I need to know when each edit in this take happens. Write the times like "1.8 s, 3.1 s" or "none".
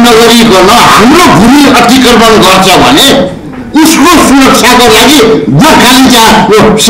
none